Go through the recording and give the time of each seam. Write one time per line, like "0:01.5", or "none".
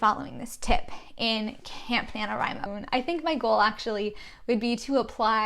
0:02.7